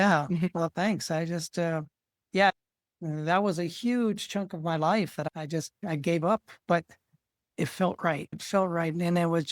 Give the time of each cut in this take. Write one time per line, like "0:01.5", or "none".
0:02.5